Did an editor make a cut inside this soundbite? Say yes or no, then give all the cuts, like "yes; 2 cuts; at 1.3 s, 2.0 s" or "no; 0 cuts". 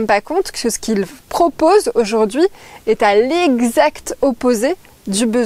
no; 0 cuts